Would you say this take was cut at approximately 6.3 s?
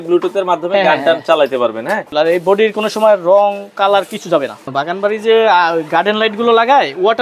no; 2 cuts; at 2.1 s, 4.6 s

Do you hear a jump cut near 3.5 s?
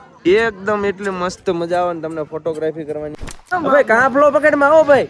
yes; 1 cut; at 3.5 s

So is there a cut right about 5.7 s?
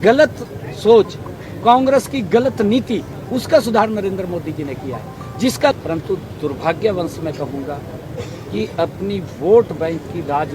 yes; 1 cut; at 5.7 s

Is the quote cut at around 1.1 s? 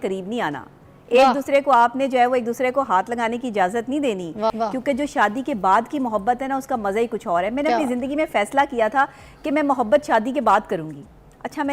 no; 1 cut; at 4.5 s

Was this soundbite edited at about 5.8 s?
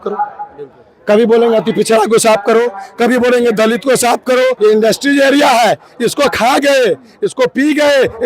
no; 1 cut; at 4.6 s

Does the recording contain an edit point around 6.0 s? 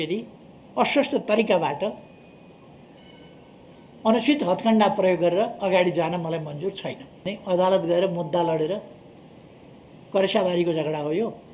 no; 1 cut; at 7.2 s

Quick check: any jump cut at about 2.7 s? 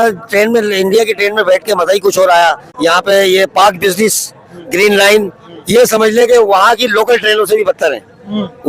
yes; 1 cut; at 2.7 s

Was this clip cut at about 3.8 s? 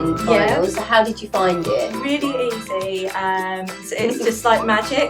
yes; 1 cut; at 3.8 s

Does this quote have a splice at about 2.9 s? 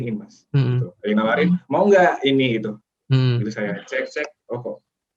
yes; 1 cut; at 2.9 s

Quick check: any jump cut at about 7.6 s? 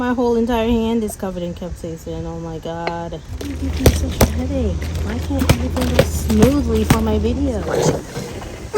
yes; 2 cuts; at 3.5 s, 7.6 s

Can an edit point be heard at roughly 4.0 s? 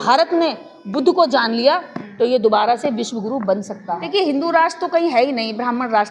yes; 1 cut; at 4.0 s

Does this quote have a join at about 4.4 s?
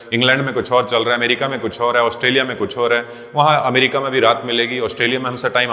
no; 0 cuts

